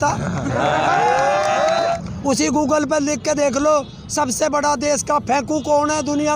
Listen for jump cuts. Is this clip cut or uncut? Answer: cut